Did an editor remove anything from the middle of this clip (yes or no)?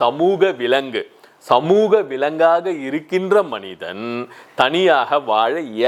no